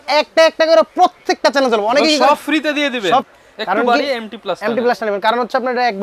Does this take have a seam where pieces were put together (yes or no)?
yes